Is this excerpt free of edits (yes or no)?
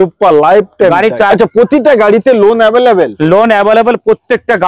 no